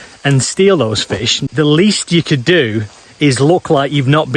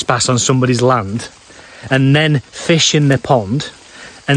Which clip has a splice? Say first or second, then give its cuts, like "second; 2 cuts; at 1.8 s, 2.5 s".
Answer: first; 1 cut; at 1.4 s